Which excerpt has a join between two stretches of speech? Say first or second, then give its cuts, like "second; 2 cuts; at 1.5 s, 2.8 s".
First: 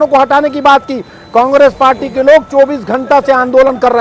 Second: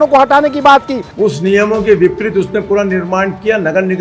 second; 1 cut; at 1.0 s